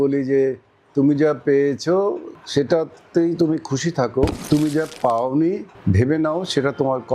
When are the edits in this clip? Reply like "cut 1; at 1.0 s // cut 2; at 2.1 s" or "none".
cut 1; at 2.3 s // cut 2; at 4.4 s // cut 3; at 5.7 s